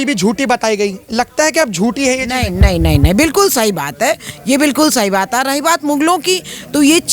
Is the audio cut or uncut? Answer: uncut